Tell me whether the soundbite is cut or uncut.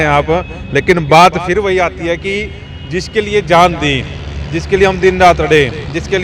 uncut